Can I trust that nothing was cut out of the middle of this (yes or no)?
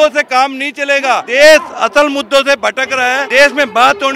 no